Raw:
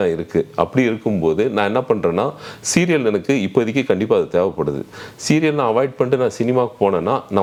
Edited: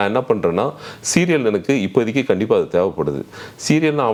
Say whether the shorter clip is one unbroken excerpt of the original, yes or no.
yes